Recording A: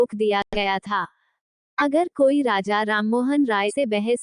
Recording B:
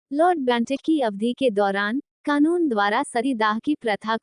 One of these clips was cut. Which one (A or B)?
B